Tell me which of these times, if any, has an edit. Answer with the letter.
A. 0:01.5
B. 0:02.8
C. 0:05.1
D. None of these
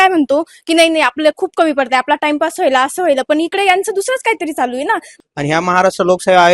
C